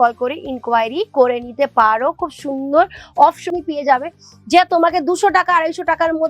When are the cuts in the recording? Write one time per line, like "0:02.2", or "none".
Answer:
0:03.5